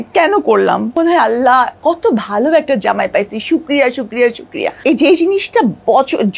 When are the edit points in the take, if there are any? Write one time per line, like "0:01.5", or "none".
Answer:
0:01.0
0:04.8